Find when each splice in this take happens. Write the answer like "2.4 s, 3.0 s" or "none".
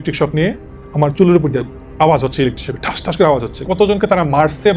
3.6 s